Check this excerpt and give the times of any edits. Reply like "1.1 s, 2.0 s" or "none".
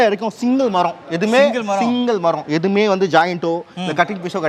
none